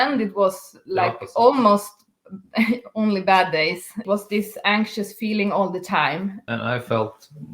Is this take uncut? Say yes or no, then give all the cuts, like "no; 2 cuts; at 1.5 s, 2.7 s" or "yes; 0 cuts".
no; 2 cuts; at 4.0 s, 6.4 s